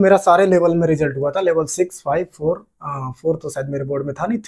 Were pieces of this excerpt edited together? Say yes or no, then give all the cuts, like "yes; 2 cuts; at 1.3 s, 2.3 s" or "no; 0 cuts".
no; 0 cuts